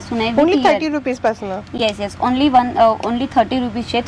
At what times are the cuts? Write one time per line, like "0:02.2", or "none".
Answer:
none